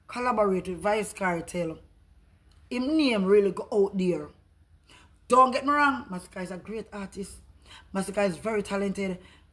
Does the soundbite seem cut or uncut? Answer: uncut